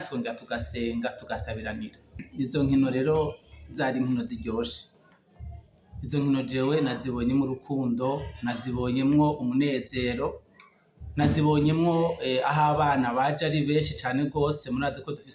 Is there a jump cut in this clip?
yes; 1 cut; at 2.2 s

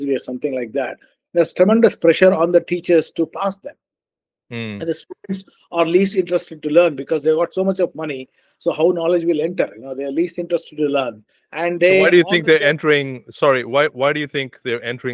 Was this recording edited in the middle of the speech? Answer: no; 0 cuts

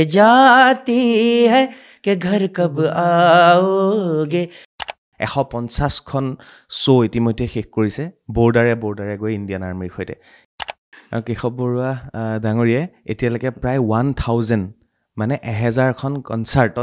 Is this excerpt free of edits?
no; 2 cuts; at 4.8 s, 10.5 s

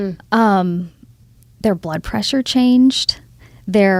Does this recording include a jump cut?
no; 0 cuts

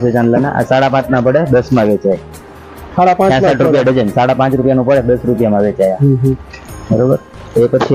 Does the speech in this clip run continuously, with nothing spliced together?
yes; 0 cuts

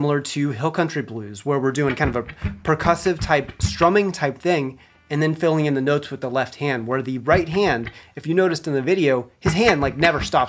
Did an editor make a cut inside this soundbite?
no; 0 cuts

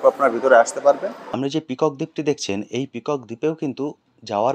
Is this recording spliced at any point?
yes; 1 cut; at 1.3 s

